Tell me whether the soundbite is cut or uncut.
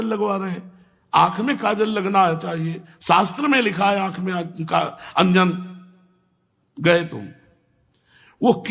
uncut